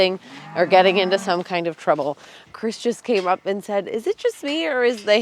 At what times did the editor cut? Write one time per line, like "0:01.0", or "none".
0:02.4